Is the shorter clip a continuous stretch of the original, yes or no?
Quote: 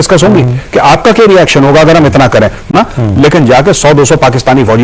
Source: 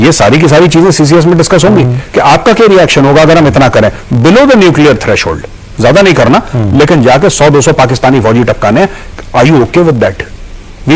no